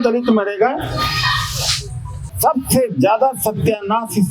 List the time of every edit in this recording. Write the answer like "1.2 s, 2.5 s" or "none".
2.2 s